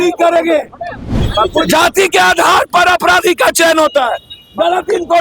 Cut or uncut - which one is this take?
cut